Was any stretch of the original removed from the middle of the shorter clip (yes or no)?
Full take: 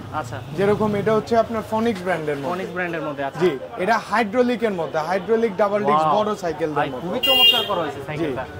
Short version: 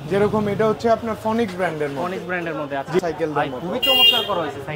yes